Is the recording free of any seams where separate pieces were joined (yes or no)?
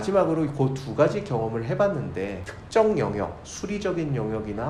yes